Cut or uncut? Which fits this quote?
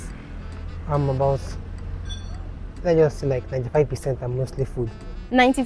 uncut